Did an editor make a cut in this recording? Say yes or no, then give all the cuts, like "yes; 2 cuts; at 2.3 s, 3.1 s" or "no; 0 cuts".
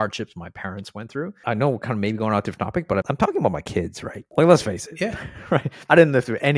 yes; 3 cuts; at 1.4 s, 3.1 s, 5.7 s